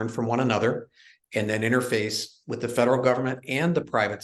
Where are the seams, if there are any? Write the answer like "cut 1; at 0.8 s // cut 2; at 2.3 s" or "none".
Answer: none